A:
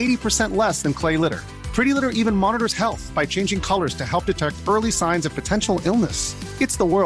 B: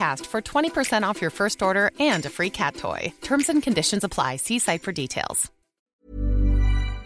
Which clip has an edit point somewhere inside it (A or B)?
B